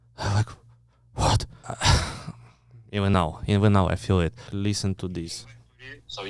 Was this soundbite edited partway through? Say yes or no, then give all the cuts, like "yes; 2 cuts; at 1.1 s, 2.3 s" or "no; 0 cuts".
yes; 2 cuts; at 1.7 s, 4.5 s